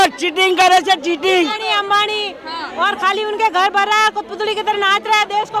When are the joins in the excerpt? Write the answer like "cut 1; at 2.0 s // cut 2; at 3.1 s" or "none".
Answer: cut 1; at 1.6 s